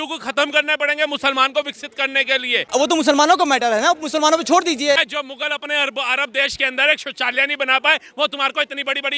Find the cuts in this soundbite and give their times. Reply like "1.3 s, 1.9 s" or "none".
2.6 s, 5.0 s

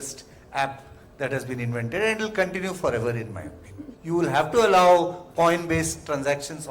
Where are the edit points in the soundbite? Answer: 4.0 s

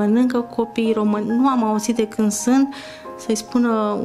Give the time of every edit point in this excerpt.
1.3 s

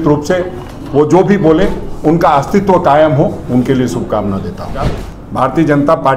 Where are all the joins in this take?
5.0 s

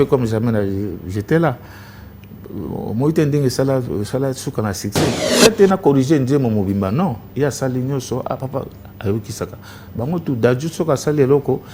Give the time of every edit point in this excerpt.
5.4 s

